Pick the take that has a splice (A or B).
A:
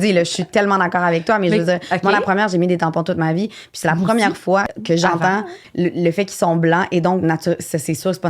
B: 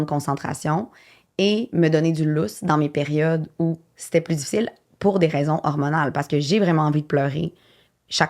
A